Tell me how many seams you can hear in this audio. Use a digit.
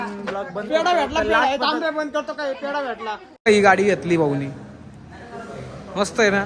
1